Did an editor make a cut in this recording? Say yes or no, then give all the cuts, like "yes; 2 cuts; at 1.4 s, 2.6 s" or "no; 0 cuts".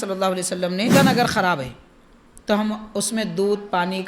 yes; 1 cut; at 0.9 s